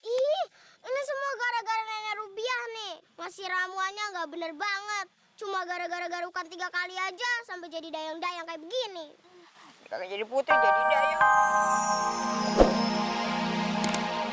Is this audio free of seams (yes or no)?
no